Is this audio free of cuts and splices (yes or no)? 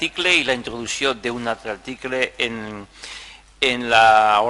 no